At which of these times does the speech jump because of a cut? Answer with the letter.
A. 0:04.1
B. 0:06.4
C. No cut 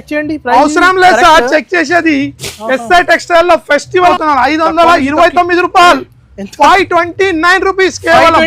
A